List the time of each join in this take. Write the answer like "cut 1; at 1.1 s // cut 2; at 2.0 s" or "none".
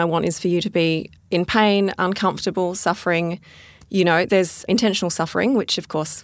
cut 1; at 1.1 s